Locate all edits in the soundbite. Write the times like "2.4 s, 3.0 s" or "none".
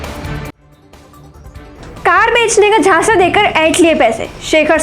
1.7 s